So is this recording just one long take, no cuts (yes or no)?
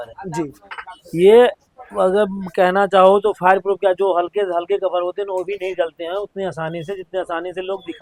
yes